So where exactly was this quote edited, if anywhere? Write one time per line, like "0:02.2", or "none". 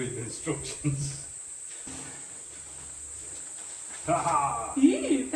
0:01.9